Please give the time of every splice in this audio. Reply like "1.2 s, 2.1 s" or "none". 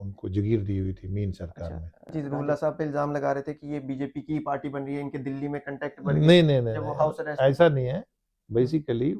2.1 s